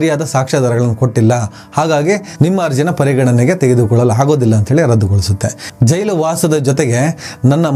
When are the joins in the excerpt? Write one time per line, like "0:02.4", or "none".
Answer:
0:05.6